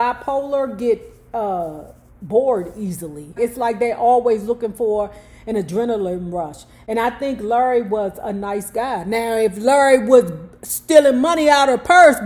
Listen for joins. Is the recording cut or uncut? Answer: uncut